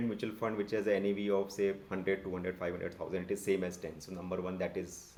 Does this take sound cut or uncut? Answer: uncut